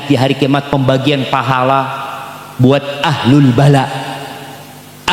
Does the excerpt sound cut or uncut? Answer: uncut